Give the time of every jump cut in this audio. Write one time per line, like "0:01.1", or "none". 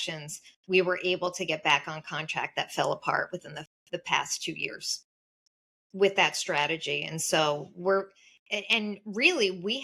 0:05.3